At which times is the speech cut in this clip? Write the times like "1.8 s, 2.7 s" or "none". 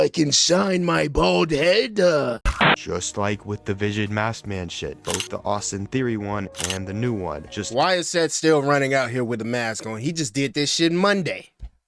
2.4 s